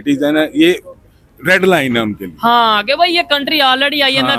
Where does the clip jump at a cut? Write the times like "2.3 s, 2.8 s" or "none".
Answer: none